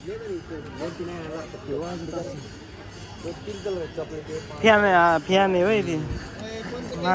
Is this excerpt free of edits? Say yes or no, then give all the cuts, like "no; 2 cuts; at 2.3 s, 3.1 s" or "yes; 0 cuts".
yes; 0 cuts